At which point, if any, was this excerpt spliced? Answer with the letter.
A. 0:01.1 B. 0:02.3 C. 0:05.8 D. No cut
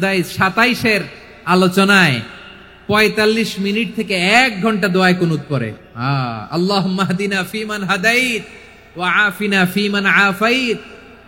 C